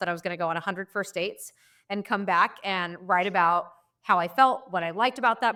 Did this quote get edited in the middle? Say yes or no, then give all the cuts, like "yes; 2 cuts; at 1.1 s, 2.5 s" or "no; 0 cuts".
no; 0 cuts